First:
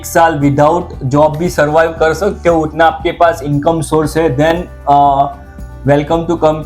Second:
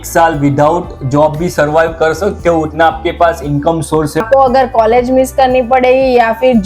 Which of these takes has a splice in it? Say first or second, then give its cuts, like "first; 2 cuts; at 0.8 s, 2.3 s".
second; 1 cut; at 4.2 s